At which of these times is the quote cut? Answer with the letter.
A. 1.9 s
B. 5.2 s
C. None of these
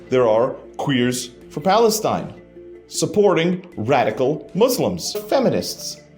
B